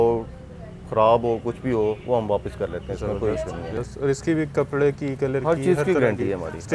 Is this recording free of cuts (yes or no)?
no